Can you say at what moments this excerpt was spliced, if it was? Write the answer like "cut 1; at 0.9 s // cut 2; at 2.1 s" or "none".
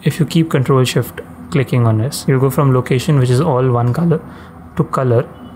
none